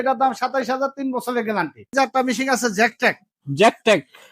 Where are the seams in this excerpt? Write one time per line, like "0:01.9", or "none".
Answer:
0:01.9